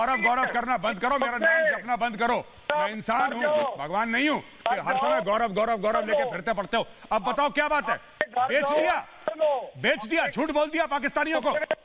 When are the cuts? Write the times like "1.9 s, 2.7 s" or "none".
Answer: none